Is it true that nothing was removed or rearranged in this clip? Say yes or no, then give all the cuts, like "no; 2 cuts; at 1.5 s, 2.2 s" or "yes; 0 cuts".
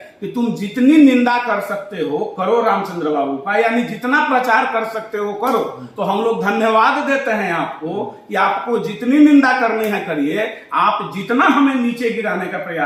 yes; 0 cuts